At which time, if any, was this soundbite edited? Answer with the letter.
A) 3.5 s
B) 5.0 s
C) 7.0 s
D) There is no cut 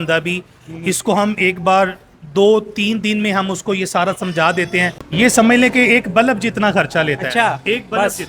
B